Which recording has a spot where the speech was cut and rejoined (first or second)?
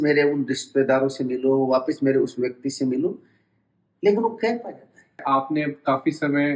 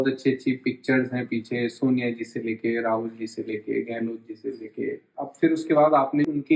first